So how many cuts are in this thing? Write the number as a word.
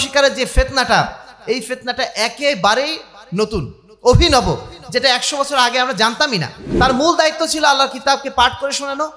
one